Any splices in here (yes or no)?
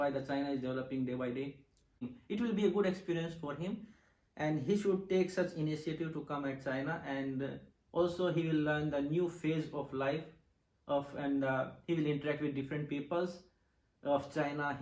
yes